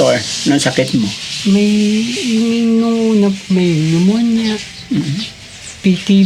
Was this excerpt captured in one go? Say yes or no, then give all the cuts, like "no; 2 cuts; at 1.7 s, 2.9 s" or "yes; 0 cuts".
yes; 0 cuts